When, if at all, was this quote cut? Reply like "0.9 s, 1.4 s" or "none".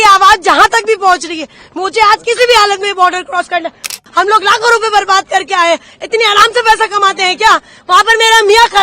3.9 s